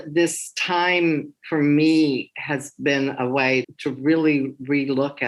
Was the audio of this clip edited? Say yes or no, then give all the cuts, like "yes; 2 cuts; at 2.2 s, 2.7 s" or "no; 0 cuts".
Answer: no; 0 cuts